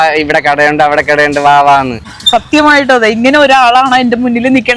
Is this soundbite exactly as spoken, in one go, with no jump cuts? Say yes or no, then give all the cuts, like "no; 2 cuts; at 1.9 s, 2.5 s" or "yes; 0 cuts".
no; 1 cut; at 2.1 s